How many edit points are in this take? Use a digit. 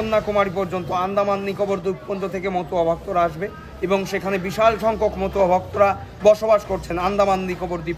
0